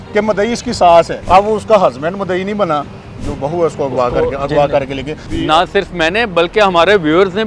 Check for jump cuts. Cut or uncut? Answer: cut